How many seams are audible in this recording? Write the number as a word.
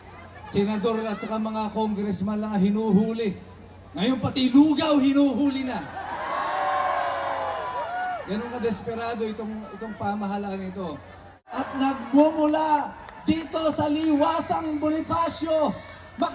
one